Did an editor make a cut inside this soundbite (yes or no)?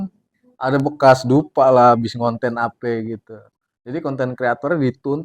no